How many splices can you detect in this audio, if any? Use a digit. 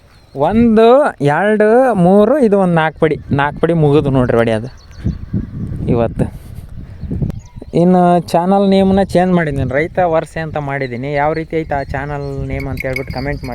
1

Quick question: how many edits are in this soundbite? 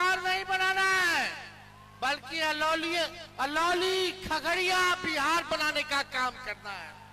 0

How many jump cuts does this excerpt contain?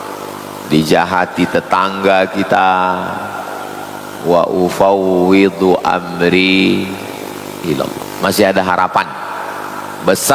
1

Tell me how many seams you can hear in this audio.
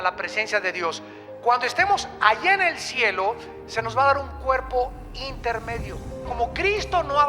1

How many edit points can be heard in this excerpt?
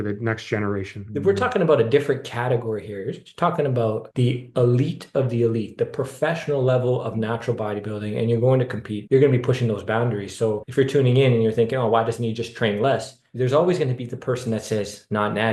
2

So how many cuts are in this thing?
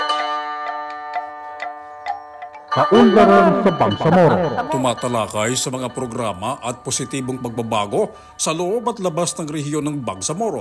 1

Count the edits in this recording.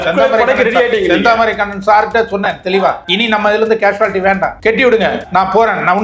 3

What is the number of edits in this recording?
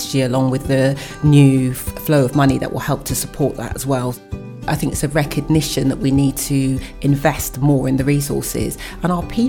1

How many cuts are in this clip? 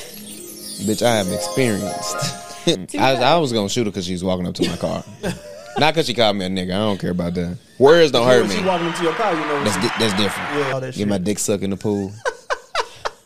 2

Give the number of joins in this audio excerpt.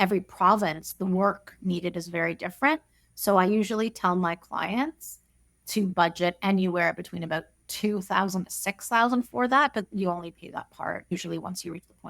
1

